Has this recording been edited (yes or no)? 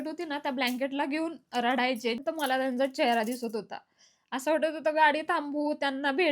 yes